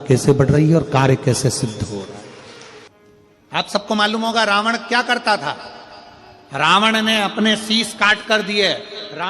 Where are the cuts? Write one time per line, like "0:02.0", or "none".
0:02.8

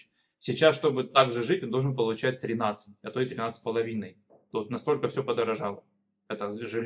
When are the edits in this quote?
none

